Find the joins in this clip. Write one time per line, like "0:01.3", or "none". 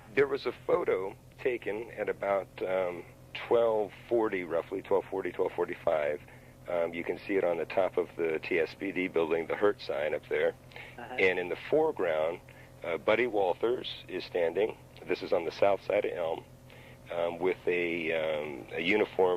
none

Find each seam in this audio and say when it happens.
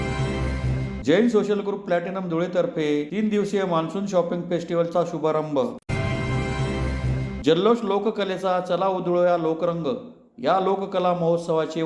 0:00.9

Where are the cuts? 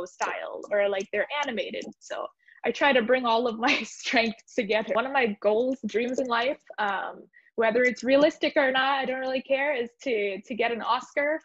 0:04.9

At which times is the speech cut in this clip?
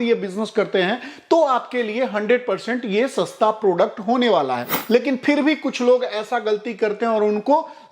0:04.7

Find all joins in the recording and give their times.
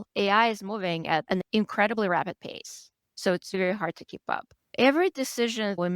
0:01.4

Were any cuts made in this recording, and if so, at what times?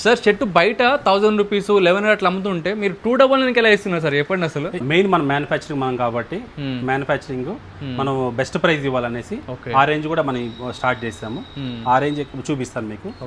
none

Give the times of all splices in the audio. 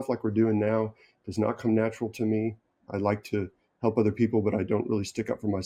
none

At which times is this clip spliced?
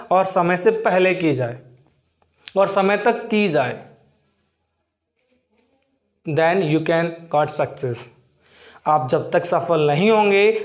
none

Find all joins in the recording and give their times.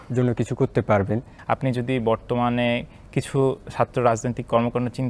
0:01.3

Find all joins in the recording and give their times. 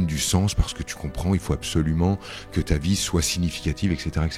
none

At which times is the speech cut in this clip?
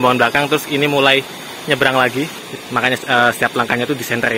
0:02.3

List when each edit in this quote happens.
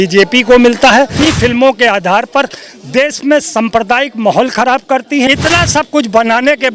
0:01.2
0:05.3

